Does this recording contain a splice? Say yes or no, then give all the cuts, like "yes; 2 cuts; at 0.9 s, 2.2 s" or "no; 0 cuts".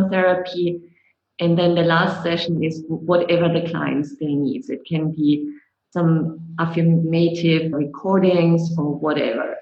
yes; 1 cut; at 7.7 s